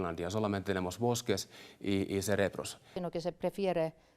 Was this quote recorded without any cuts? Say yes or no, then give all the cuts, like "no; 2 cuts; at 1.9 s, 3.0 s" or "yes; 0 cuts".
no; 1 cut; at 2.9 s